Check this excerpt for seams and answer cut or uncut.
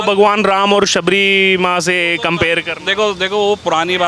uncut